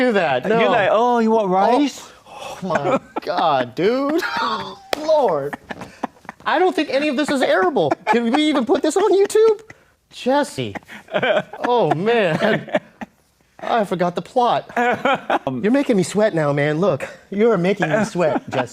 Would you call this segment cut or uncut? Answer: cut